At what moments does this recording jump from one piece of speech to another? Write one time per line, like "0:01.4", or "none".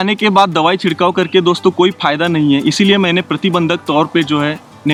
none